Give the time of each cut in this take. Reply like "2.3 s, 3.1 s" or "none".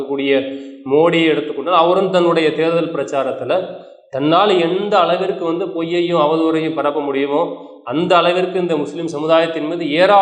none